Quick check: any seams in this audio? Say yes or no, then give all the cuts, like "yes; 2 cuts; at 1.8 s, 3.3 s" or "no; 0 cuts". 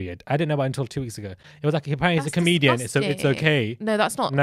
no; 0 cuts